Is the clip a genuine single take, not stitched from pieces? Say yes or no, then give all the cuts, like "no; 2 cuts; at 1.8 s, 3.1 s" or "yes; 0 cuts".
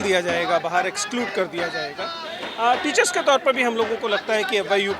yes; 0 cuts